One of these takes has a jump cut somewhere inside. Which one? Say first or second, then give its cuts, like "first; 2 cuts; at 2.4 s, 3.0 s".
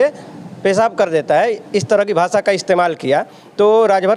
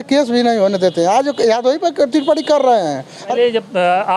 second; 1 cut; at 3.1 s